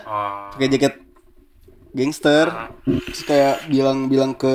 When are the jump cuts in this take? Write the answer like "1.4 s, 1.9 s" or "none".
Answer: none